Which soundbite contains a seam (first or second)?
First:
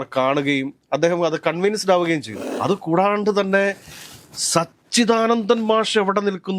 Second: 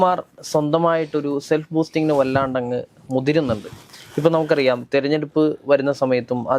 first